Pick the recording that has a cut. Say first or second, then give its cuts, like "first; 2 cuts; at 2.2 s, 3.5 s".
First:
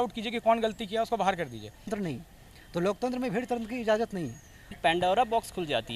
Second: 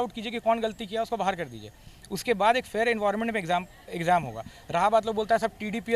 first; 2 cuts; at 1.9 s, 4.7 s